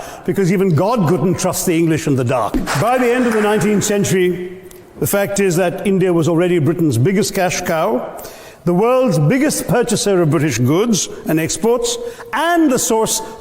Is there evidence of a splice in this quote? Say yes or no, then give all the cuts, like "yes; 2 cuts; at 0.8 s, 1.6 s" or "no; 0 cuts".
yes; 1 cut; at 2.6 s